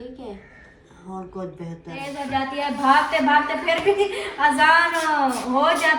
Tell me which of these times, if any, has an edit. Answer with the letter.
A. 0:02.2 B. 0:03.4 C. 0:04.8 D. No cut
A